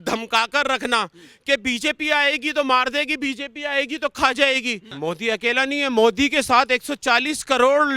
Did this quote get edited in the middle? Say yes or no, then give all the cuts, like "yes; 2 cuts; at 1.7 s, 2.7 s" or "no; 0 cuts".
yes; 1 cut; at 4.9 s